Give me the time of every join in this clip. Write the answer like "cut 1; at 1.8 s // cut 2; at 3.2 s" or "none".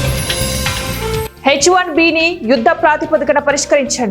cut 1; at 1.3 s

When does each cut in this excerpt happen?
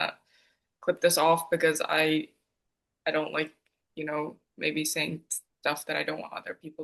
none

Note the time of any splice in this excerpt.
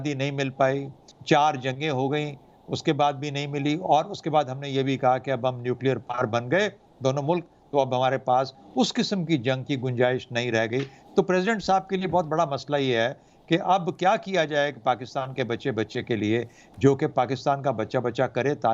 none

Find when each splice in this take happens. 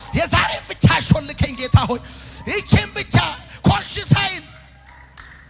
none

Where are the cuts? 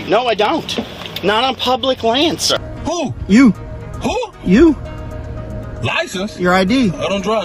cut 1; at 2.5 s

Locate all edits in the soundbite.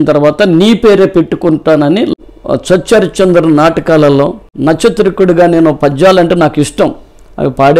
cut 1; at 2.1 s // cut 2; at 4.4 s

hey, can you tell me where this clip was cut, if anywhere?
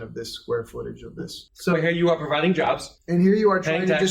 cut 1; at 1.4 s // cut 2; at 2.9 s

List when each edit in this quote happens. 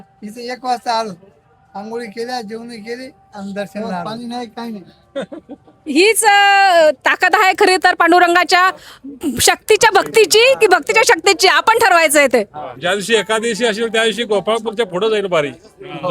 cut 1; at 4.0 s // cut 2; at 12.8 s

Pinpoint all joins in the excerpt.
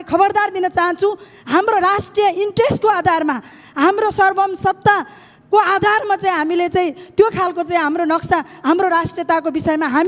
none

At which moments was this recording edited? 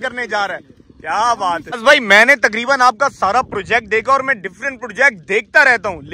none

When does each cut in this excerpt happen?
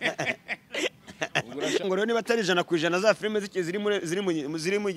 cut 1; at 1.8 s

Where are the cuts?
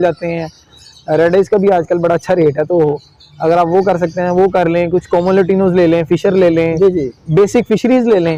none

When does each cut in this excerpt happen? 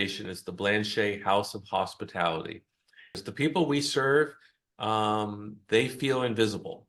cut 1; at 3.2 s

